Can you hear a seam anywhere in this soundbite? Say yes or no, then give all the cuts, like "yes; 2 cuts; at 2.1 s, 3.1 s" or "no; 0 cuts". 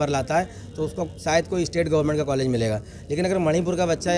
no; 0 cuts